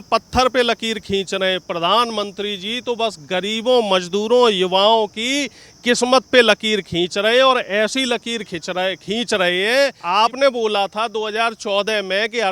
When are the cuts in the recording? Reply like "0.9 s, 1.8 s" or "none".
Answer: 10.0 s

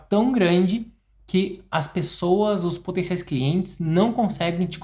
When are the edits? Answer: none

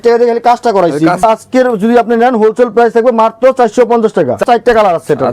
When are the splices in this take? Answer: 1.2 s, 4.4 s

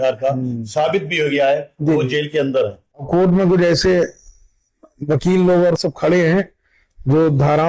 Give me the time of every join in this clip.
3.1 s

